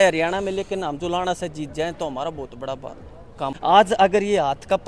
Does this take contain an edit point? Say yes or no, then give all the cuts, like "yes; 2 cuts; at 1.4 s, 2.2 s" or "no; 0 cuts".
yes; 1 cut; at 3.5 s